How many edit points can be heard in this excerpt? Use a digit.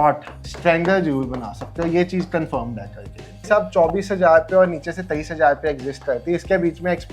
1